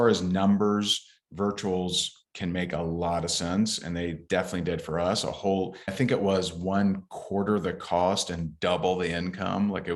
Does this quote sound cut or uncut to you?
uncut